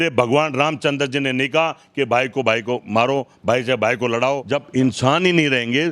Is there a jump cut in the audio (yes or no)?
yes